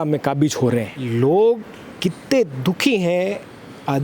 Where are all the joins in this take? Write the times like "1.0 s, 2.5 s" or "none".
1.0 s